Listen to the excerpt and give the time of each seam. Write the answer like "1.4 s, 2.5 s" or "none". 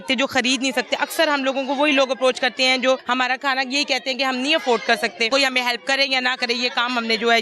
3.0 s, 5.3 s